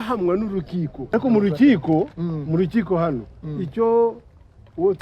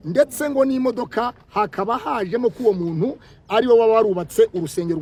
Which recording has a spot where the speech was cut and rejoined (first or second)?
first